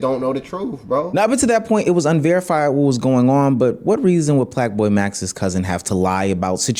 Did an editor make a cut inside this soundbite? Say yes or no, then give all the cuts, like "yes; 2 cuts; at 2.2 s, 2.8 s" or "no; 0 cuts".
no; 0 cuts